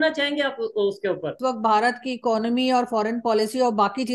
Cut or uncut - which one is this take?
cut